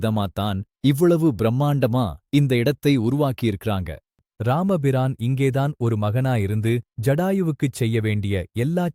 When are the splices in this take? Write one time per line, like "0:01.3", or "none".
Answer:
0:04.3